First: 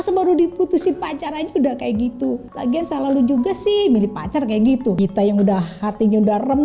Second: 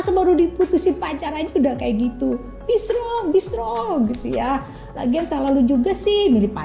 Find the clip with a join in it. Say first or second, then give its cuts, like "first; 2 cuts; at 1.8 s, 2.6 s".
first; 2 cuts; at 2.5 s, 5.0 s